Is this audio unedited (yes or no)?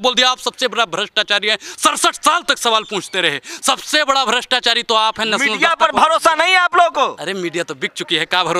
yes